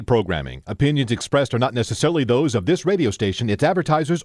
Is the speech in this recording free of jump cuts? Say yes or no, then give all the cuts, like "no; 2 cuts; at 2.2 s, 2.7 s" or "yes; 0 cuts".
yes; 0 cuts